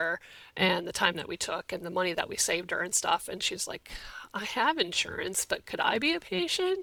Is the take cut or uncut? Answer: uncut